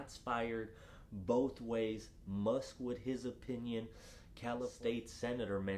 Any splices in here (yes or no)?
yes